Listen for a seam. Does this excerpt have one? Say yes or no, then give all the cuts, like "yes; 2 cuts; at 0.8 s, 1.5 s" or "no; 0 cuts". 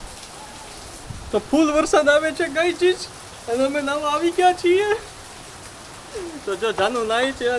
no; 0 cuts